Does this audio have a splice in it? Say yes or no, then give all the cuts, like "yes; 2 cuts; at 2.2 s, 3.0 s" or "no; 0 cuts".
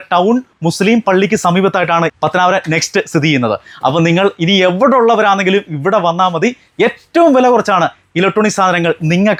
no; 0 cuts